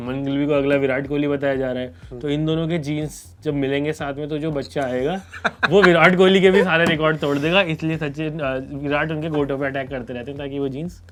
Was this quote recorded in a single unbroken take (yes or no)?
yes